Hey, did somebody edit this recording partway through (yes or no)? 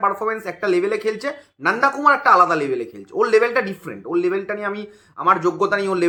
no